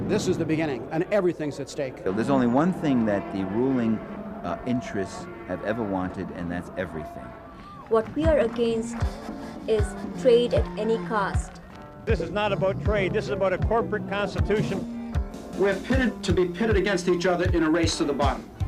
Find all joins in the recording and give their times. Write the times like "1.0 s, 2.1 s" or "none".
8.8 s